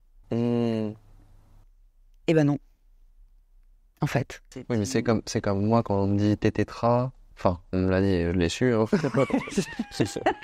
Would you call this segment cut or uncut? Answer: cut